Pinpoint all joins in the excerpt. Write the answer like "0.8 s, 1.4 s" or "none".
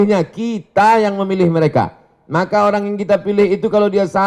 none